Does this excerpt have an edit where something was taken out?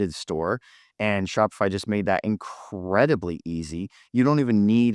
no; 0 cuts

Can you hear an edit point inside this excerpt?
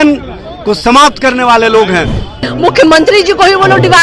yes; 1 cut; at 2.5 s

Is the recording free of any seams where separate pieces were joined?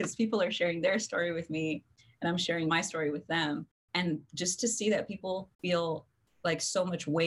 no; 3 cuts; at 2.7 s, 3.8 s, 5.5 s

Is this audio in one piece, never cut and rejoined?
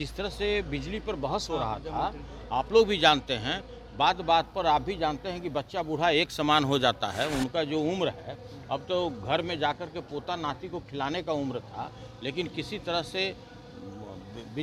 yes; 0 cuts

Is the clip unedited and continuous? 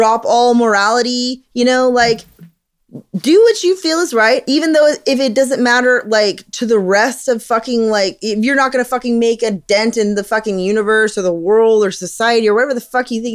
no; 1 cut; at 4.4 s

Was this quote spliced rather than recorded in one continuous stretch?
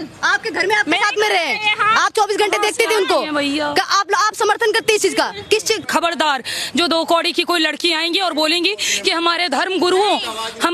yes; 1 cut; at 5.8 s

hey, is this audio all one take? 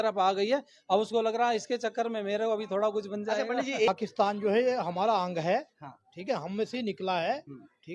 no; 1 cut; at 3.9 s

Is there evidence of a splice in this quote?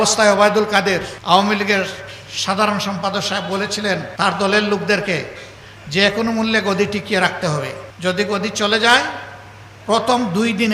yes; 3 cuts; at 1.1 s, 4.1 s, 7.8 s

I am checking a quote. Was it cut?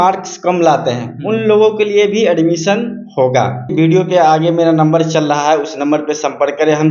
yes; 1 cut; at 3.7 s

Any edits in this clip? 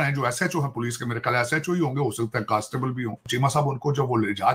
yes; 1 cut; at 3.3 s

